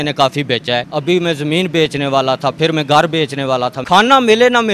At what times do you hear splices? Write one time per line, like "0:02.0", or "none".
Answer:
0:00.9
0:03.8